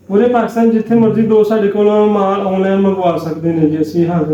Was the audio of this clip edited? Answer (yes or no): no